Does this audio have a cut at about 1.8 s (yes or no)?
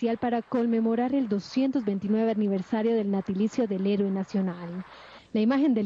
yes